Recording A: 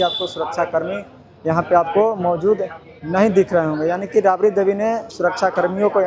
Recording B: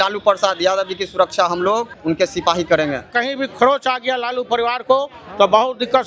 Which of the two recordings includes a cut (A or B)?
B